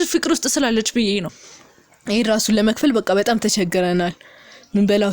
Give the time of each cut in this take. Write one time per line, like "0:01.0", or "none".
0:01.4